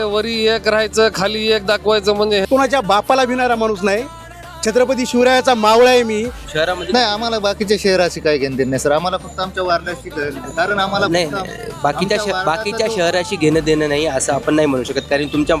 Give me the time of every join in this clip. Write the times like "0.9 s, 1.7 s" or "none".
2.5 s, 6.4 s